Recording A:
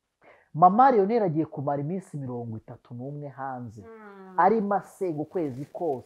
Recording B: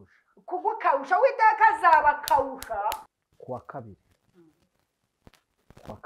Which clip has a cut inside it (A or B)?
B